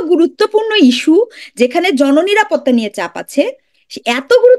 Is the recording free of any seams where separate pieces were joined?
yes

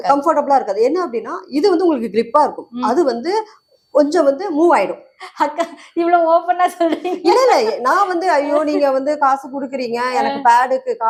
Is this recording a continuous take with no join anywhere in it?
yes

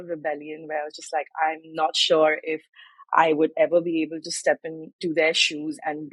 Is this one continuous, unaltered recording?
yes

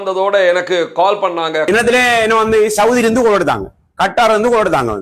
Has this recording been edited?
yes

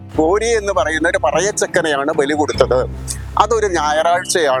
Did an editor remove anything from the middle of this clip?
no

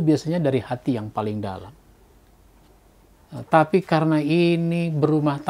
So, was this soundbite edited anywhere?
yes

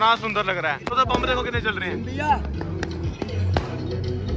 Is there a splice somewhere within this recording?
yes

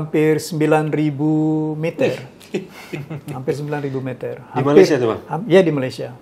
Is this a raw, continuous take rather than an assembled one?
yes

